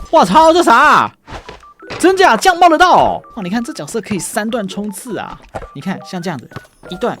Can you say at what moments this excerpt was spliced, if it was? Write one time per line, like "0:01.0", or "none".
0:03.3